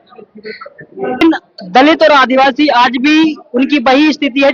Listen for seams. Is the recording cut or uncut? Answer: cut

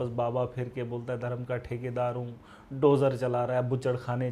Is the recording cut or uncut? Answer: uncut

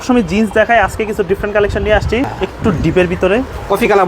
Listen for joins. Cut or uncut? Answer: cut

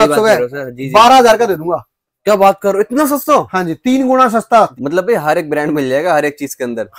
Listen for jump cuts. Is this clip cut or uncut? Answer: cut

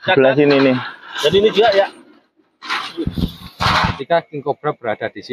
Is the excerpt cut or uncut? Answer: cut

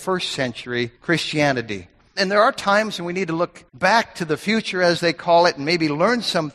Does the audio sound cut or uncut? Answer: cut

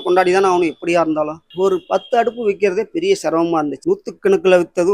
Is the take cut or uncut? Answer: cut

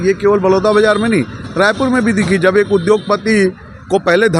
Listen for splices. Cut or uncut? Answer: uncut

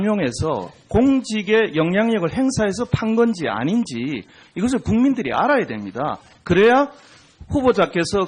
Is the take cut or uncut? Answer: cut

